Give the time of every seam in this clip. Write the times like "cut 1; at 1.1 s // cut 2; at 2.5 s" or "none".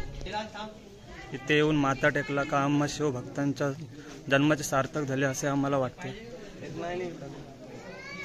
none